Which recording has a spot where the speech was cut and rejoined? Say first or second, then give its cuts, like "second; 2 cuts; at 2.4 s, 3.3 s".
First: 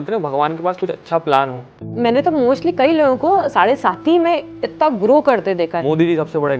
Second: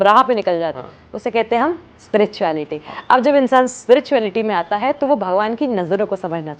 first; 1 cut; at 1.8 s